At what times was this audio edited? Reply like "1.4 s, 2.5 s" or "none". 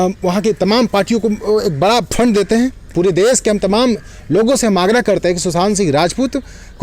2.8 s